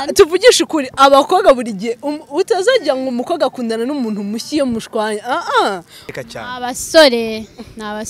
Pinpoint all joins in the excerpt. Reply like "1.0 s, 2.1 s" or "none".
6.0 s